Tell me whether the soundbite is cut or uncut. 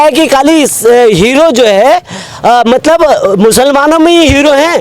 uncut